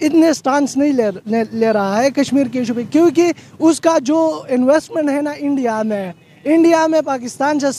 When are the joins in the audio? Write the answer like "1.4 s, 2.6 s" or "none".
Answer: none